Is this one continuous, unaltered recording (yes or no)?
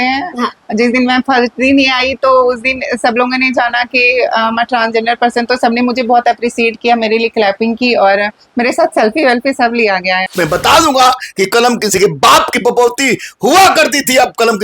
no